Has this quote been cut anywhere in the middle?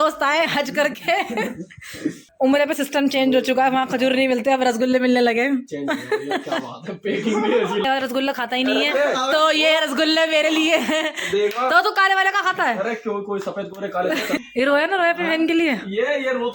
yes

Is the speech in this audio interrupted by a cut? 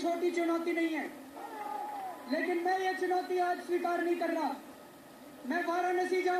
no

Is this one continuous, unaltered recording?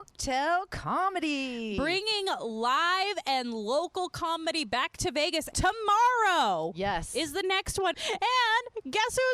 no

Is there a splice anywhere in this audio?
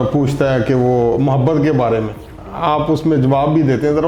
no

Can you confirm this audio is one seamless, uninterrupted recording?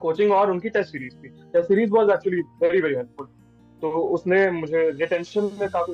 yes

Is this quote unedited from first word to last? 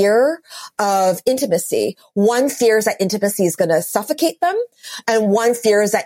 yes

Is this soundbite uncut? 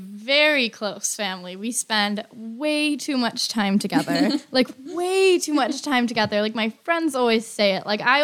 yes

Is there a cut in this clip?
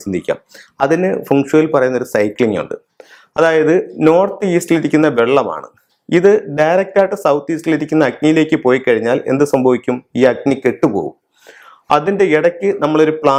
no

